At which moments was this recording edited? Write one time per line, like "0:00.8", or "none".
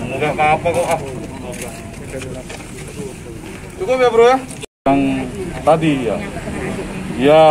0:04.7